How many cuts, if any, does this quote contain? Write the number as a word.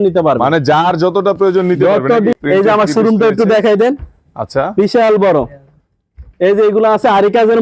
one